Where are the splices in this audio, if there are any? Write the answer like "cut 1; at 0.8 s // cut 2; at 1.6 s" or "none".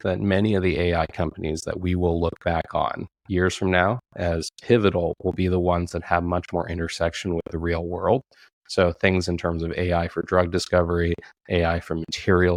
none